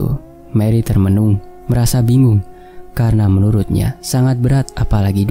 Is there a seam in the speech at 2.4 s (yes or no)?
no